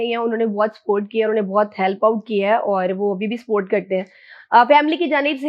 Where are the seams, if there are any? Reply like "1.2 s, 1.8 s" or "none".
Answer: none

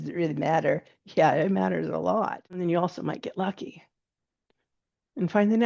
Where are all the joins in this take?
2.6 s

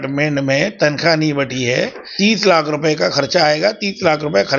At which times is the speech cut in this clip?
2.0 s

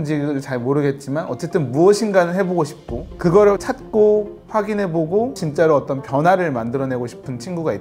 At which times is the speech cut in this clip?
3.6 s, 5.4 s

